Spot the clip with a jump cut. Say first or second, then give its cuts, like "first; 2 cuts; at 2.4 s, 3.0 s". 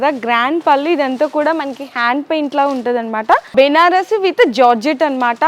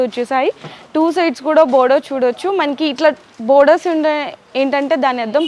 first; 1 cut; at 3.5 s